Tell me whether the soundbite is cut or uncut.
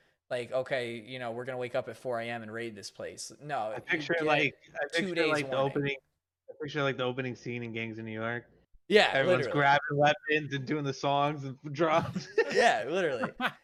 uncut